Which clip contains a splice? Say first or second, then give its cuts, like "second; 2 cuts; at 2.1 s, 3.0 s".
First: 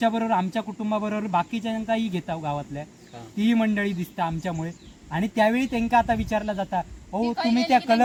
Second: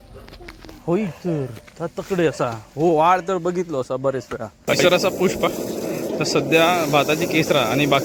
second; 1 cut; at 4.7 s